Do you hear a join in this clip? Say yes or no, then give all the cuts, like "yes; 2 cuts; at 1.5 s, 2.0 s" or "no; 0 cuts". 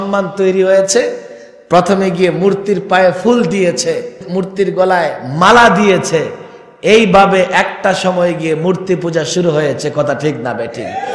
yes; 1 cut; at 4.2 s